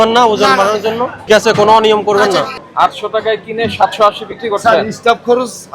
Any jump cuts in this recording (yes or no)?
yes